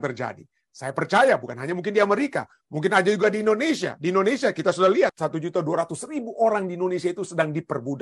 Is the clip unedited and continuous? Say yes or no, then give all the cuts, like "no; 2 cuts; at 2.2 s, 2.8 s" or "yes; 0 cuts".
no; 1 cut; at 5.1 s